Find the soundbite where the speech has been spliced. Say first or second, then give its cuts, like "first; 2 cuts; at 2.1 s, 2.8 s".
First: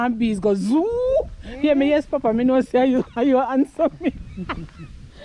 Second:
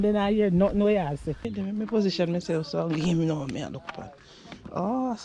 second; 1 cut; at 1.5 s